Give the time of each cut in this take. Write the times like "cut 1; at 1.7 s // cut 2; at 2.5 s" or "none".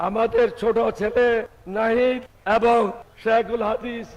cut 1; at 2.3 s // cut 2; at 3.1 s